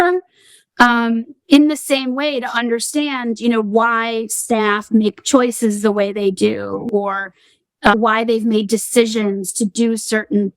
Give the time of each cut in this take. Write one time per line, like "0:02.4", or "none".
0:07.9